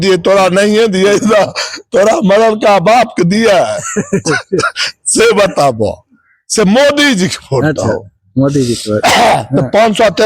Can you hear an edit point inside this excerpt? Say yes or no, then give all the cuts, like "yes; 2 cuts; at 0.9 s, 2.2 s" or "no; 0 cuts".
no; 0 cuts